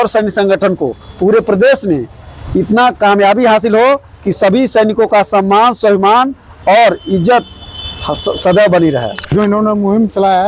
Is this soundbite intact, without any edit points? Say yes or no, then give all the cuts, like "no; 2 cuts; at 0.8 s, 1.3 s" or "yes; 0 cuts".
no; 1 cut; at 9.2 s